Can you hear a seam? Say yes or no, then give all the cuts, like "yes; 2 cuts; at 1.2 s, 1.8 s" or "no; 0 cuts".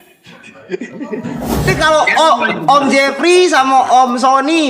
yes; 1 cut; at 1.7 s